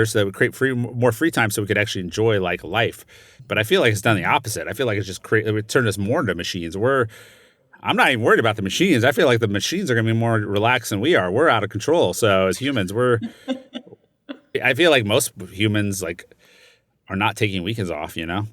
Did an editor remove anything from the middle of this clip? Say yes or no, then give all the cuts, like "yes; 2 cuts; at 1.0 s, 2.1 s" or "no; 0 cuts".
yes; 2 cuts; at 3.4 s, 14.5 s